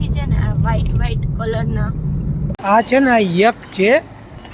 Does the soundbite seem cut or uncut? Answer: cut